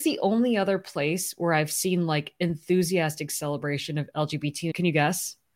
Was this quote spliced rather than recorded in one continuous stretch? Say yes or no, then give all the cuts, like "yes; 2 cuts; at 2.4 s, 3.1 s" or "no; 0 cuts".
yes; 1 cut; at 4.6 s